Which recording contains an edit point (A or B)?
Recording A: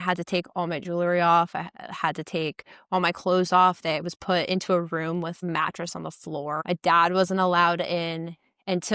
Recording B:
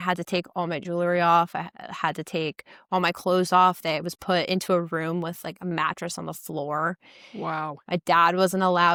A